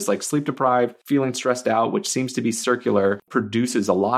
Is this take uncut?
no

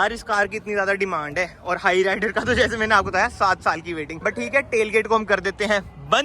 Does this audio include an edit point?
no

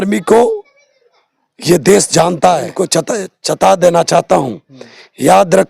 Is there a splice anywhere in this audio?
yes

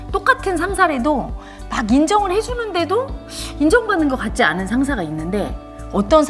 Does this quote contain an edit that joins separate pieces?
no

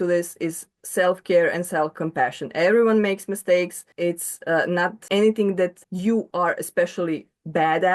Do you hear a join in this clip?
yes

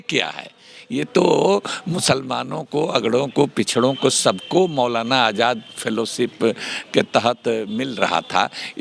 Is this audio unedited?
yes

